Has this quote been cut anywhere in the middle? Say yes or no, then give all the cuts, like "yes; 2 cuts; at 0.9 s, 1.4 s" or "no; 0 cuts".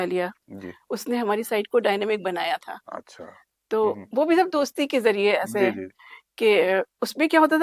no; 0 cuts